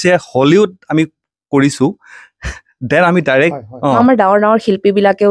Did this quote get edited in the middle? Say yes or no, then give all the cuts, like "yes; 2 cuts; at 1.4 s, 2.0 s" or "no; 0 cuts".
yes; 1 cut; at 4.0 s